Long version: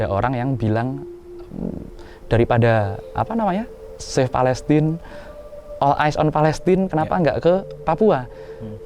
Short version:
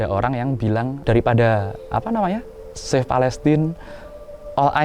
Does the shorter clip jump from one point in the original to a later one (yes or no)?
yes